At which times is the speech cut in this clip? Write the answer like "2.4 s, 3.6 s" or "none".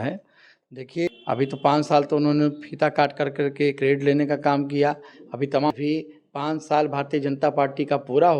1.1 s, 5.7 s